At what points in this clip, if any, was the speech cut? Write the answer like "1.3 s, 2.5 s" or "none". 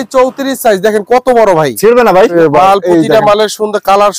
2.3 s